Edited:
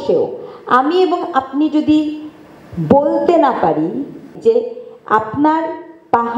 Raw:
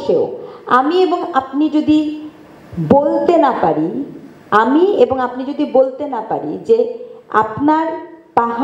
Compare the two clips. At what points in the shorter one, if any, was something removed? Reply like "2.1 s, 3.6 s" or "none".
4.3 s